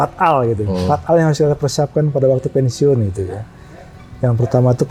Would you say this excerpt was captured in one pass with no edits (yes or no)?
yes